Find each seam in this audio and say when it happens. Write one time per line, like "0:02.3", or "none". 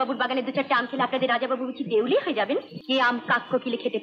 0:02.7